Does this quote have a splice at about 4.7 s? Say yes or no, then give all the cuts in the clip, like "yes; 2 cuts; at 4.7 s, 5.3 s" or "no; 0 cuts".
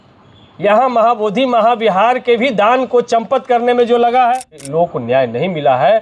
yes; 1 cut; at 4.7 s